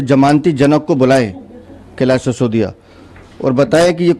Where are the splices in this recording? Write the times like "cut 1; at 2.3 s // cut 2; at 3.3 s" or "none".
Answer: none

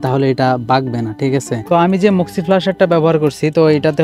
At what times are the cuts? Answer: cut 1; at 1.6 s

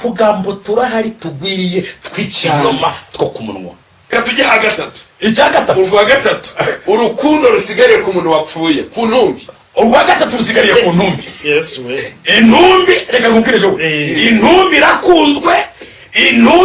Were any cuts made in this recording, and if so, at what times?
cut 1; at 4.1 s

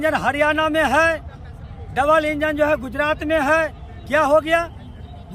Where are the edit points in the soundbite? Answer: none

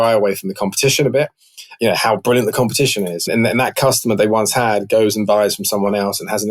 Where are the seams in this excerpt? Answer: cut 1; at 3.3 s

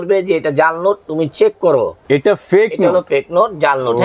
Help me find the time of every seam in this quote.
cut 1; at 2.0 s

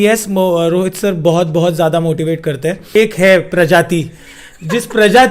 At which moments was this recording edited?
cut 1; at 2.8 s

